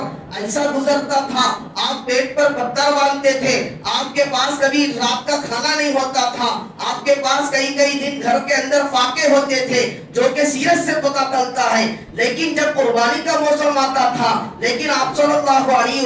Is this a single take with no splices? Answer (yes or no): yes